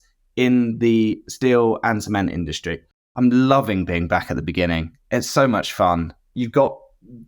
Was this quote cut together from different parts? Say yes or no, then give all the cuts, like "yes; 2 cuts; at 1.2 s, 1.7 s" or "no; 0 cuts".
yes; 2 cuts; at 3.0 s, 6.2 s